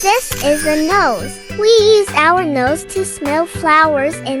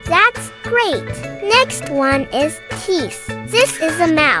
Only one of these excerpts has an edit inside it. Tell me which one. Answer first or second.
second